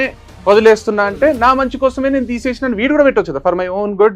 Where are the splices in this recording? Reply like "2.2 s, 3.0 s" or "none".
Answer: none